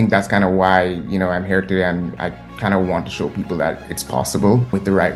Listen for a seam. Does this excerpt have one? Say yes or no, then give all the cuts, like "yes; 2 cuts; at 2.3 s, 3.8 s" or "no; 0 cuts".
no; 0 cuts